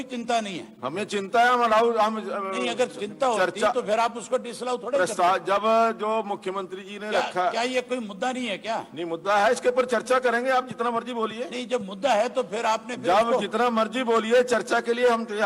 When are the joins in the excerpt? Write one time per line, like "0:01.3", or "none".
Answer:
none